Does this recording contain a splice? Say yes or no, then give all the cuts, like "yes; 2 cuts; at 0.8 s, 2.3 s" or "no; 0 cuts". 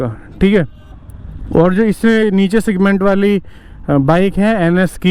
no; 0 cuts